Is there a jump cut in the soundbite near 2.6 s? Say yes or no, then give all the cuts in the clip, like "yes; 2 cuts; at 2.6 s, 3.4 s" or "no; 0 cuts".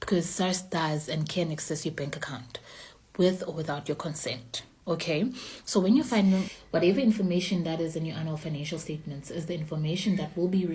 no; 1 cut; at 6.5 s